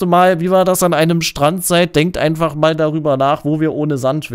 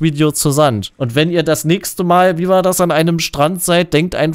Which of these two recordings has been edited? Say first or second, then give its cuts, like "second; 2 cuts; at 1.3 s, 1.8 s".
second; 1 cut; at 0.9 s